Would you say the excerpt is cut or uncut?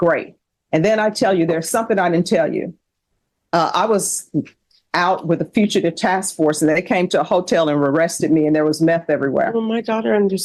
uncut